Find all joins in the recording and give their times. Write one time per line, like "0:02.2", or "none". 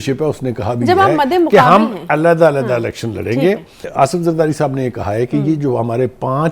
0:03.9